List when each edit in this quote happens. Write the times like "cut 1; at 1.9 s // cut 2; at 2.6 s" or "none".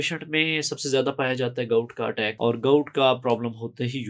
cut 1; at 2.3 s